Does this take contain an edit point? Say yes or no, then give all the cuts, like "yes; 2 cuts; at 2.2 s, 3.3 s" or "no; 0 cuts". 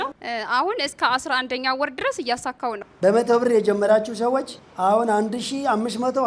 yes; 2 cuts; at 2.9 s, 4.6 s